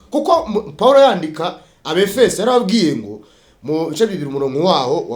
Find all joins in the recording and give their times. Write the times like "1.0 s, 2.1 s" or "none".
none